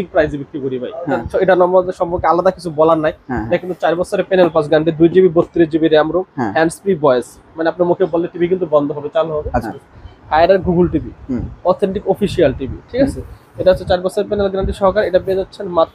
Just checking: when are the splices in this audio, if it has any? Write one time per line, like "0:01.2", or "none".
0:01.2
0:09.6